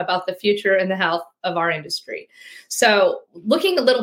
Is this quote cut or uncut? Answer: uncut